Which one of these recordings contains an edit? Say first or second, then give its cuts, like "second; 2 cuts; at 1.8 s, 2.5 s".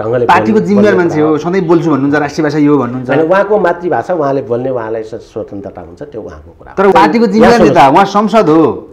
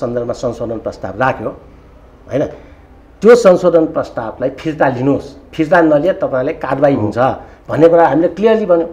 first; 1 cut; at 6.9 s